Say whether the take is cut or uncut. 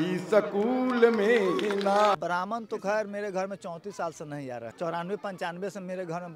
cut